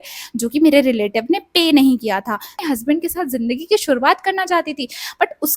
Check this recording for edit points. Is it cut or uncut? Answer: cut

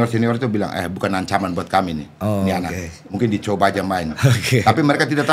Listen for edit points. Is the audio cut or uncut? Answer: uncut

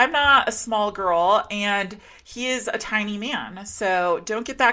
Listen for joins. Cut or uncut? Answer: uncut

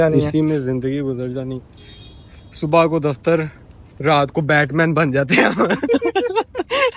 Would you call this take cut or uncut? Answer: cut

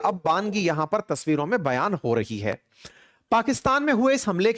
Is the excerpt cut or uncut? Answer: uncut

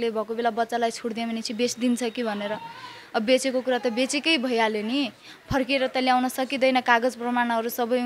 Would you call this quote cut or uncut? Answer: uncut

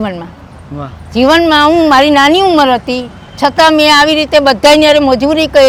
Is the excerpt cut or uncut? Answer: uncut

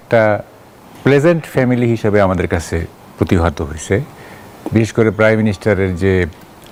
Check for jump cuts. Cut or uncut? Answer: uncut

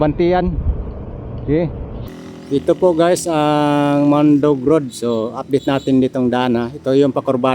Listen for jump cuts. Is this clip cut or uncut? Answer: cut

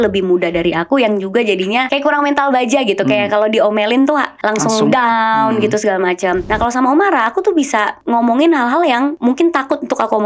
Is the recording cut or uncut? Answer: cut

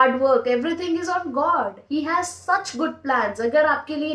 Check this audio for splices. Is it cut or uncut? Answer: uncut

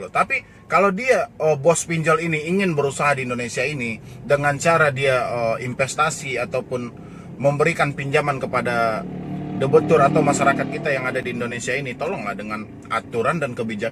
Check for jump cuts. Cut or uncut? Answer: uncut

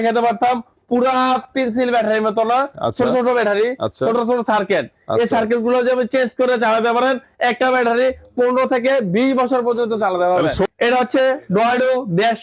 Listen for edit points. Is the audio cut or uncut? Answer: cut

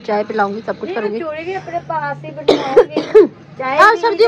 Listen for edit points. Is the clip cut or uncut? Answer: uncut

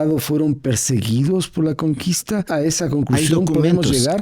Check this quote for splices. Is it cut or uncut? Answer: cut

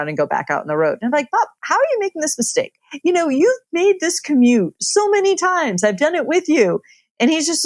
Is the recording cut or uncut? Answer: cut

